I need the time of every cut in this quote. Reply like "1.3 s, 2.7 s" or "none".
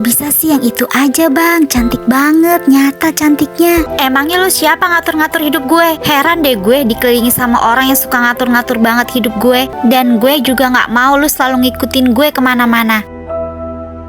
3.9 s, 9.7 s